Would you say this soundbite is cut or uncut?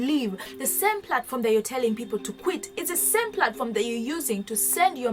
uncut